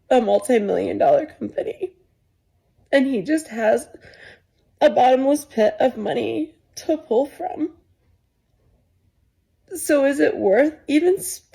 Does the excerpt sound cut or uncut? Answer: uncut